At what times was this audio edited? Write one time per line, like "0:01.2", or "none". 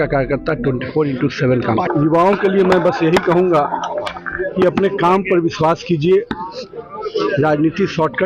0:01.9

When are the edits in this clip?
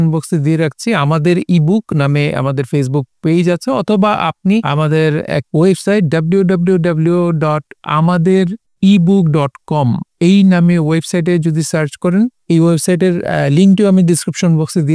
0:05.1
0:08.6

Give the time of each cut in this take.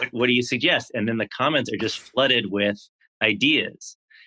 none

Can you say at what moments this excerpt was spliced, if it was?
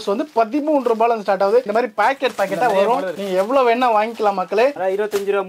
0:01.7
0:03.2
0:04.7

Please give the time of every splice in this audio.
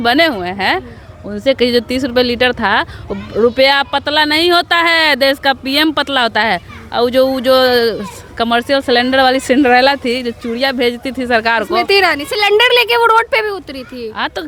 none

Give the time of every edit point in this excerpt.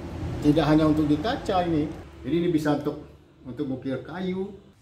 0:02.1

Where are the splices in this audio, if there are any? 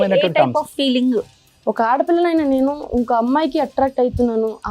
0:01.3

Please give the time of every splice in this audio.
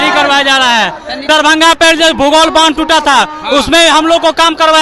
0:01.3

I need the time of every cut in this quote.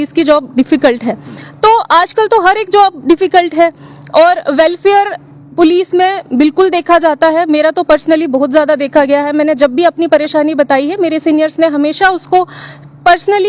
none

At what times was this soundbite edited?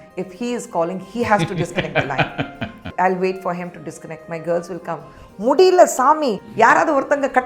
0:02.8
0:06.4

